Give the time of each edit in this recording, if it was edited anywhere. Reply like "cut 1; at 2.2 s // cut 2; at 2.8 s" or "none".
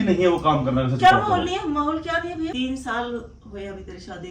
cut 1; at 2.5 s